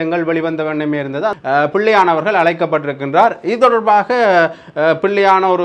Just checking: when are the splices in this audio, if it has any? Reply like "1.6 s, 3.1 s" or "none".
1.4 s